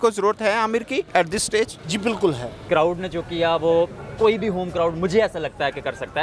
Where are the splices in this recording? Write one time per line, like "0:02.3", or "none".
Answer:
0:01.1
0:01.8
0:02.6